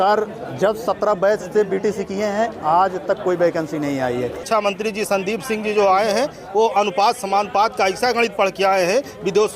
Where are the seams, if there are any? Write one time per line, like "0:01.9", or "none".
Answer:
0:04.4